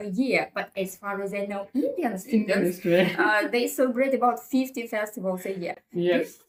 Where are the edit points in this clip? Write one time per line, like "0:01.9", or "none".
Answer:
none